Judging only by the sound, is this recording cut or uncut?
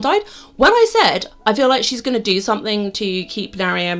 uncut